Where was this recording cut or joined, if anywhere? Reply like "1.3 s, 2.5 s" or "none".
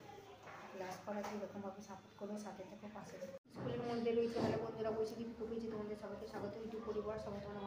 3.4 s